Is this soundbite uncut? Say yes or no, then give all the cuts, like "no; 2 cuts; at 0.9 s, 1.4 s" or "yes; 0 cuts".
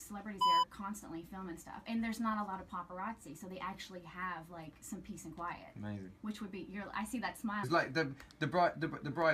yes; 0 cuts